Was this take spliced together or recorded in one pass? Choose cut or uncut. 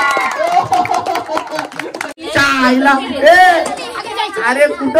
cut